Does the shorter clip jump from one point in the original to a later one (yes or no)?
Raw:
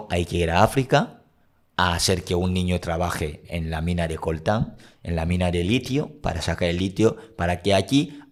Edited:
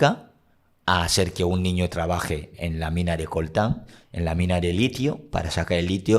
no